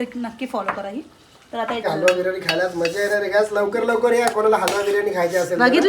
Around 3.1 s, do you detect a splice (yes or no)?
no